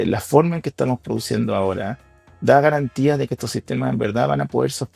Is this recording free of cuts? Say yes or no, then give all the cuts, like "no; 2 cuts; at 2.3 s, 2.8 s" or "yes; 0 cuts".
yes; 0 cuts